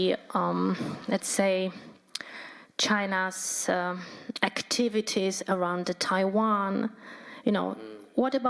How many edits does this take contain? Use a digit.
0